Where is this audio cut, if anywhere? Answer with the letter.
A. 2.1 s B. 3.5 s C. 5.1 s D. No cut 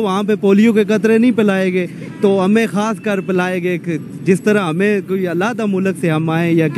D